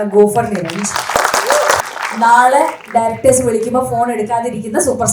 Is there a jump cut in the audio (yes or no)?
yes